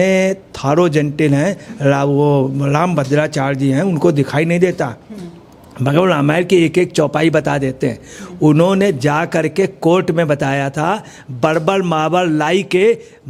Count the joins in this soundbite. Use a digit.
0